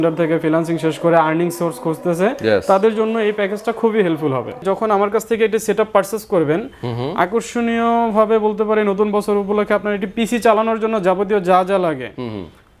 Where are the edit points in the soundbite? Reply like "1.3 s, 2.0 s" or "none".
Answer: 4.6 s